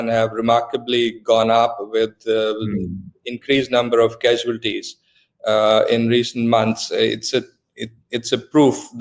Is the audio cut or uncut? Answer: uncut